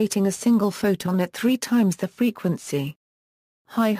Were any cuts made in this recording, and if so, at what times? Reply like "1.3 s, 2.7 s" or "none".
none